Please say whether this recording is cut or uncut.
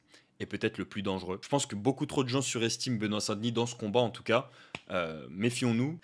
uncut